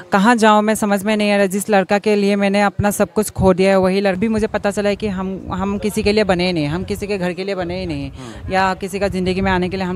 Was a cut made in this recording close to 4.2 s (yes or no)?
yes